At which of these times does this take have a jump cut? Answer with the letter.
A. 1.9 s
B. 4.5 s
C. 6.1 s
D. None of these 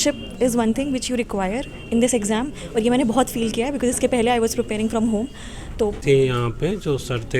C